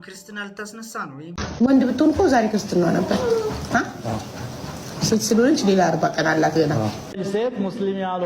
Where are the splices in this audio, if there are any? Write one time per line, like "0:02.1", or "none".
0:01.3
0:07.2